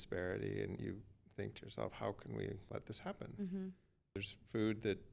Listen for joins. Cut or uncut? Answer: cut